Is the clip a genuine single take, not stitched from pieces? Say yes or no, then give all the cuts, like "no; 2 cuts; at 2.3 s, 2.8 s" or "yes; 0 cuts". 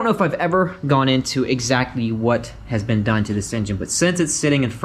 yes; 0 cuts